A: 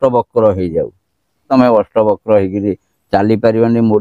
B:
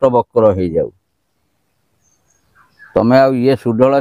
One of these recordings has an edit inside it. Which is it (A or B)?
A